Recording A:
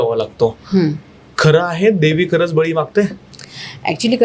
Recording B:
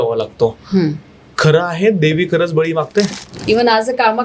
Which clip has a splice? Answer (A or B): B